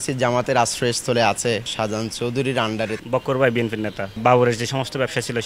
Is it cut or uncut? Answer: cut